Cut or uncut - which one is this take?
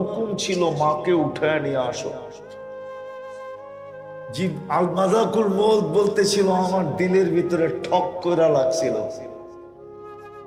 uncut